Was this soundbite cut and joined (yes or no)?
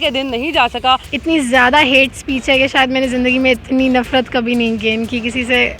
yes